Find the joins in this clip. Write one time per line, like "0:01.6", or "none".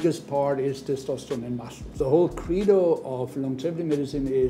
0:02.0